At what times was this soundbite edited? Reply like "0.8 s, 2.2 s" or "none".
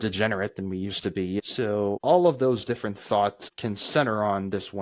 1.4 s, 3.4 s

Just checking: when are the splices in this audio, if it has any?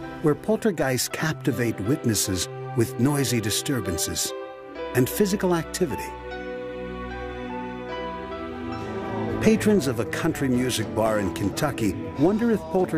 11.0 s

